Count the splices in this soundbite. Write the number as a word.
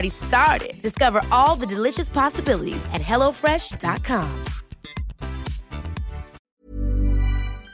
one